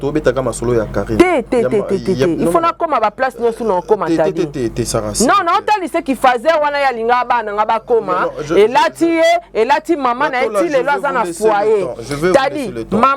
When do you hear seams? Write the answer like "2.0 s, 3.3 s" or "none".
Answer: none